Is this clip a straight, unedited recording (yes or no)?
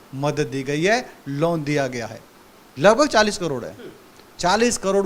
yes